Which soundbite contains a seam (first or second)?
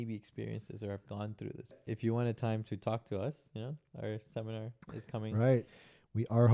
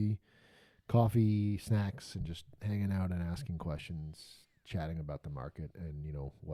first